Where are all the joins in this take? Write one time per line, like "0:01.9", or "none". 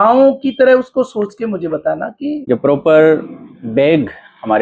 0:02.4